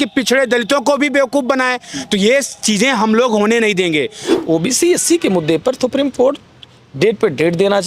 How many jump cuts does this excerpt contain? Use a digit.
1